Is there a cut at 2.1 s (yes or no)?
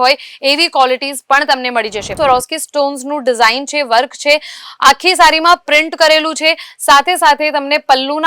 yes